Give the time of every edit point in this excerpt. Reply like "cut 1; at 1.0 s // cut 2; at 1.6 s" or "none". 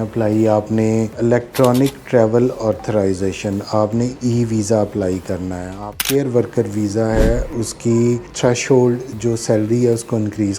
cut 1; at 5.8 s